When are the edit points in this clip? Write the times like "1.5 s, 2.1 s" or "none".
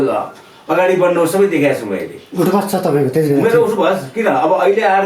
none